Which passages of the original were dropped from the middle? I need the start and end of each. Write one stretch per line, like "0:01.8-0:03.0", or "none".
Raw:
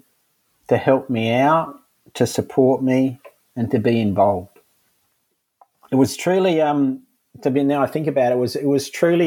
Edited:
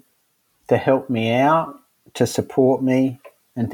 none